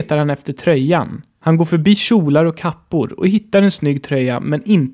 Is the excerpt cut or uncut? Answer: cut